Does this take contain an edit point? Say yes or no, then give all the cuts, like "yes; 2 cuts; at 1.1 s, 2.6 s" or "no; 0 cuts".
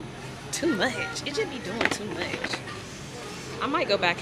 no; 0 cuts